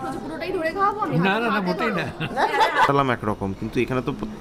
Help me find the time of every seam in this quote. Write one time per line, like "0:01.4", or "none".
0:02.9